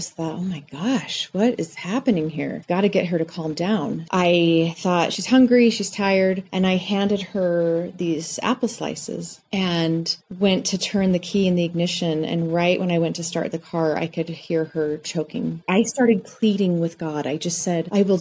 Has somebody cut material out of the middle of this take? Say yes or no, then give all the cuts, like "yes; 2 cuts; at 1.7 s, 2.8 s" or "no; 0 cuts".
yes; 2 cuts; at 4.0 s, 15.6 s